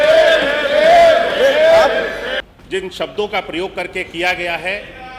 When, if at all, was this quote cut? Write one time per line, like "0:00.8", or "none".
0:02.3